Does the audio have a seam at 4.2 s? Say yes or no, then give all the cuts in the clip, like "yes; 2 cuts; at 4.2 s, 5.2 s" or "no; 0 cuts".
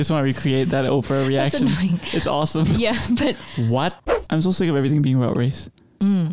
yes; 1 cut; at 4.2 s